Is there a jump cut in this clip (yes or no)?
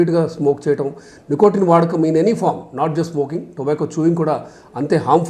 no